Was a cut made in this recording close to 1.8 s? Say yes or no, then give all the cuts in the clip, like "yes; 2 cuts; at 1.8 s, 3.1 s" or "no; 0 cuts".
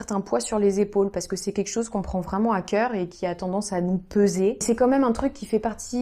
no; 1 cut; at 4.6 s